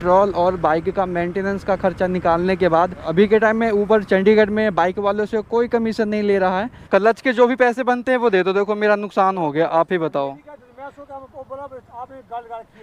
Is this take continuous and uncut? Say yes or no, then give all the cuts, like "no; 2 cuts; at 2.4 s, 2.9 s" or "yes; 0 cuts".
no; 2 cuts; at 3.1 s, 6.8 s